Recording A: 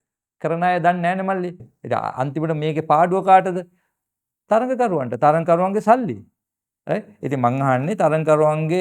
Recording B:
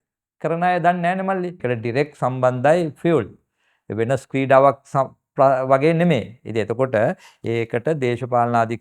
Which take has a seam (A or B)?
B